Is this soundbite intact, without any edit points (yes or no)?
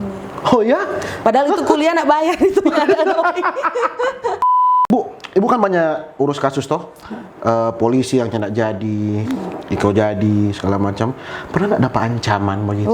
no